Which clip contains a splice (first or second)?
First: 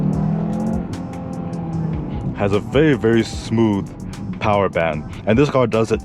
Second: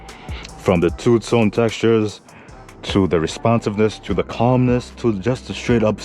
first